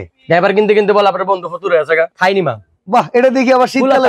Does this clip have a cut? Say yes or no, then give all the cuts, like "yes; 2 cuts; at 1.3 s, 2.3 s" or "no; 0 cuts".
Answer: yes; 1 cut; at 2.1 s